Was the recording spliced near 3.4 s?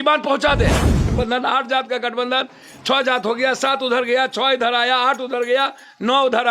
no; 1 cut; at 1.1 s

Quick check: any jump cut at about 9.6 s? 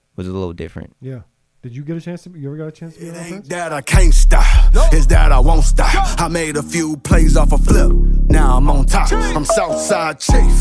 no; 1 cut; at 3.4 s

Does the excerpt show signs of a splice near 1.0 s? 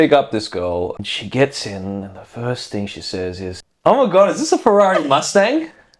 yes; 2 cuts; at 1.0 s, 3.7 s

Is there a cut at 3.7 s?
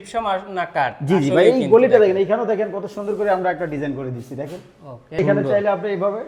no; 1 cut; at 5.2 s

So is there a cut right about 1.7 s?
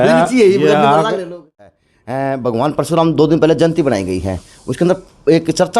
yes; 1 cut; at 1.7 s

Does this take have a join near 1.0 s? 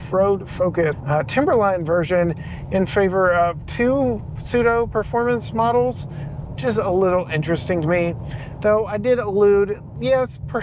yes; 1 cut; at 1.0 s

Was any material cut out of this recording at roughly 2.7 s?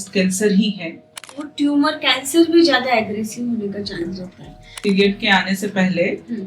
no; 2 cuts; at 1.0 s, 4.8 s

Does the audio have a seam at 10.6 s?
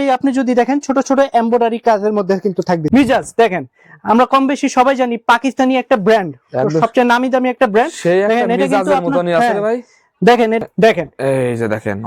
yes; 2 cuts; at 2.8 s, 10.6 s

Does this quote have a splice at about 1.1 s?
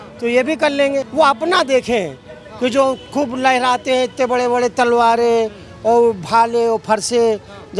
yes; 1 cut; at 1.1 s

